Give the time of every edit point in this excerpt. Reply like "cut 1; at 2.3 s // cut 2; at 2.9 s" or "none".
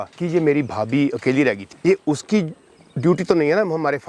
none